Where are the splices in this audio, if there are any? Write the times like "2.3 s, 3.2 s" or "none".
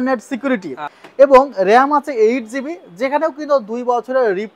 1.0 s